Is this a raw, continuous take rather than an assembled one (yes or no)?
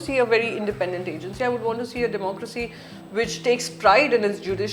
yes